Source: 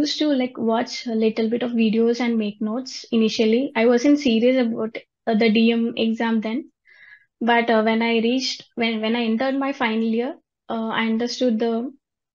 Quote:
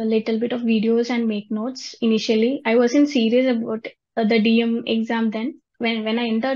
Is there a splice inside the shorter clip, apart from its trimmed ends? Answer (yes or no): yes